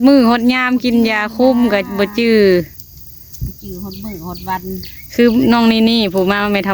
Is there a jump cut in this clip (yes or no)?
no